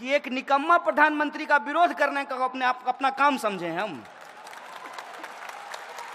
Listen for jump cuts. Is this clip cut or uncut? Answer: uncut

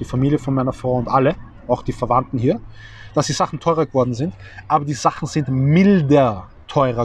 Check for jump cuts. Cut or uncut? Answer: uncut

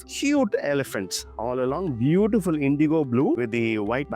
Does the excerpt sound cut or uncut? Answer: uncut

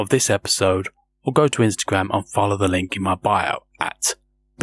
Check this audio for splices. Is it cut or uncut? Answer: uncut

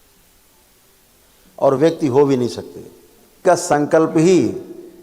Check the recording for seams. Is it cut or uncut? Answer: cut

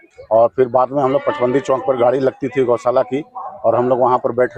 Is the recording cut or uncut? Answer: uncut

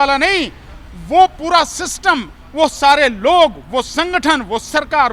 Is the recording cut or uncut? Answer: uncut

